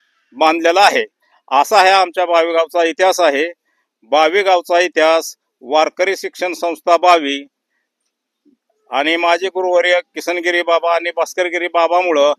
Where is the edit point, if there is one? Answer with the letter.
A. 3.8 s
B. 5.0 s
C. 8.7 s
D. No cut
D